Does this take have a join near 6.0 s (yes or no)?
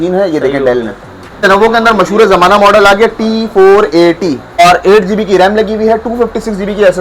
no